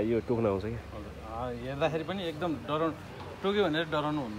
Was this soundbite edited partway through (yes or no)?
no